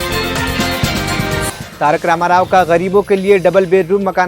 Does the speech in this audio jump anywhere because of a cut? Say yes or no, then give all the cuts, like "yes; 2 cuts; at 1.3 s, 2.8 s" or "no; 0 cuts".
yes; 1 cut; at 1.7 s